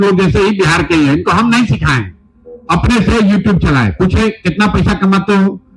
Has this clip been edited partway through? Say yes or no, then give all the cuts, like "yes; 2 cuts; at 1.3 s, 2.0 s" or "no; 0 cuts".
no; 0 cuts